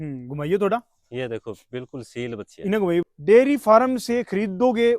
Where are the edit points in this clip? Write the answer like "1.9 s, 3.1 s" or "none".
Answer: 3.0 s